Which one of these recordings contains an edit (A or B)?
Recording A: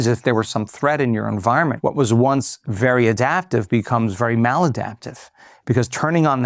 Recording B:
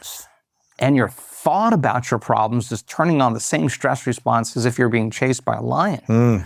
A